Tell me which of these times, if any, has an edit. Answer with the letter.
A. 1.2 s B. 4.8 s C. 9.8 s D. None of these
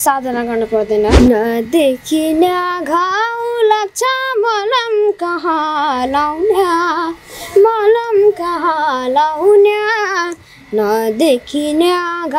A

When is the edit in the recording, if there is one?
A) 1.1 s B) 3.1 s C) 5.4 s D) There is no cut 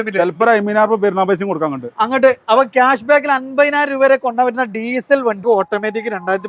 C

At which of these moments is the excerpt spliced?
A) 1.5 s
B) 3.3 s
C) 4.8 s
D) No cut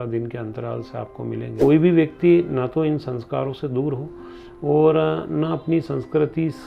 A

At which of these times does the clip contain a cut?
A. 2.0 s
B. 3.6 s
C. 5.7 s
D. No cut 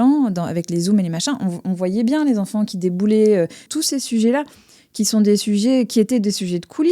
B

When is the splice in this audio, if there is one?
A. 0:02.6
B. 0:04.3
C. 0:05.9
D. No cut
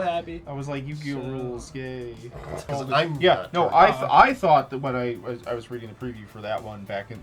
A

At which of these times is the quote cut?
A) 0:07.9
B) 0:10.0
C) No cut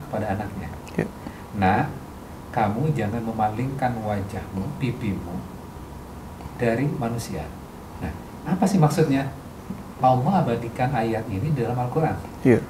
B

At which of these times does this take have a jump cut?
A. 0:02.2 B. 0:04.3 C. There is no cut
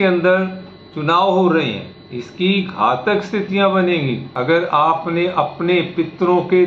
B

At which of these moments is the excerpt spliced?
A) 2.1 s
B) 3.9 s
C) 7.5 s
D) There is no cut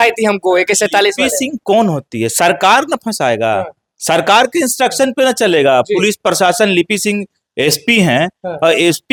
D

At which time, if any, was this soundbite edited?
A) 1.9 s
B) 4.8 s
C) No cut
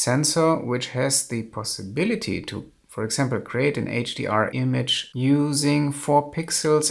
B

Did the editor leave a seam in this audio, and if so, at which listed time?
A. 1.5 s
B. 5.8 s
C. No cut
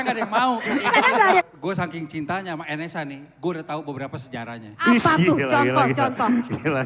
A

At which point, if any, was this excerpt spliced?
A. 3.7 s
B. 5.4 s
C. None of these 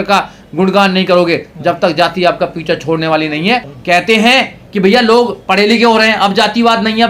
A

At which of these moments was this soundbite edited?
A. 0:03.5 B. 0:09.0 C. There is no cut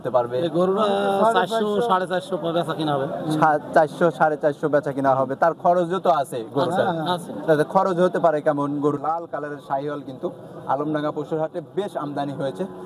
B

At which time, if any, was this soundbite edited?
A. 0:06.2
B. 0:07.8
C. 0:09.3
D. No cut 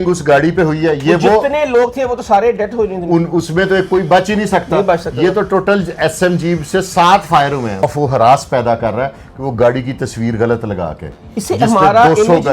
B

